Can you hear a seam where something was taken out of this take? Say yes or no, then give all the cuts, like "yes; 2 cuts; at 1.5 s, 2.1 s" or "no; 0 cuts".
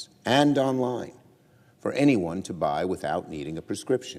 yes; 1 cut; at 1.9 s